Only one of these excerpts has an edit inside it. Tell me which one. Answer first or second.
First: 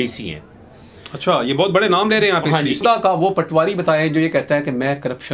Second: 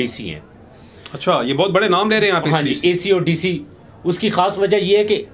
first